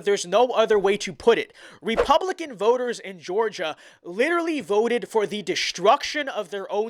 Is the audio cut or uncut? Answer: uncut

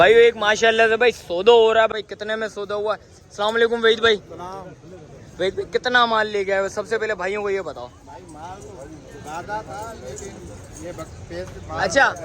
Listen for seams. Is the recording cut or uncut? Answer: cut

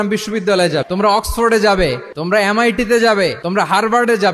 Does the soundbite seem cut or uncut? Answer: cut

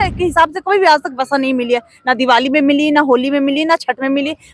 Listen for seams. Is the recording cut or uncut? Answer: uncut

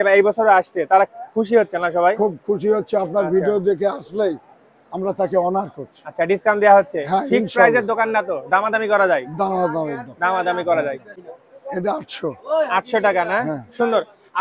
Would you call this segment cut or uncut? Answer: cut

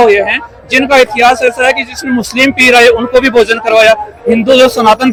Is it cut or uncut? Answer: uncut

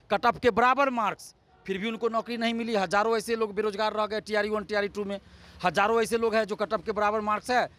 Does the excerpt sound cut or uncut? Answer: uncut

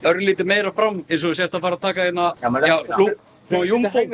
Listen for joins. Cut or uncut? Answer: cut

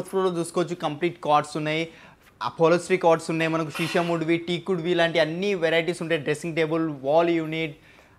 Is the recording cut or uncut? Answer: uncut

